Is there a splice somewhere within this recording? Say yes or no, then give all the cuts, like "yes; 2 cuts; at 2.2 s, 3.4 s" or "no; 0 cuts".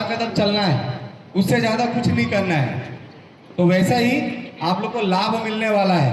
no; 0 cuts